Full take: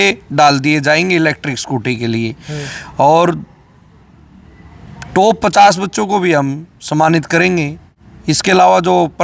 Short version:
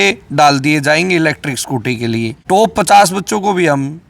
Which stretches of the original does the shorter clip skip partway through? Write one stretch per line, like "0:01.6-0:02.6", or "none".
0:02.4-0:05.0